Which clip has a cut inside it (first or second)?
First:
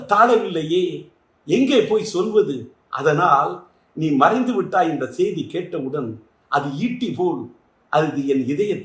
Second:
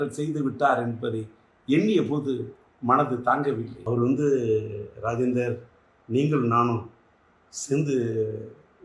second